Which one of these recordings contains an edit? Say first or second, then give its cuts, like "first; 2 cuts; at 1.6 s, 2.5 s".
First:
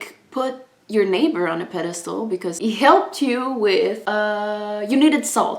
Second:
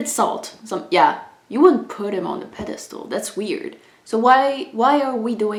first; 2 cuts; at 2.6 s, 4.0 s